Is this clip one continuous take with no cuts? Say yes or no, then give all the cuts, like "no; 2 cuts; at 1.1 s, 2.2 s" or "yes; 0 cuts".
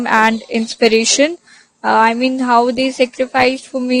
yes; 0 cuts